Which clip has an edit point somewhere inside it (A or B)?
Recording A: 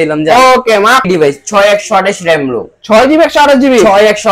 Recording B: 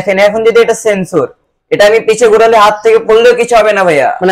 A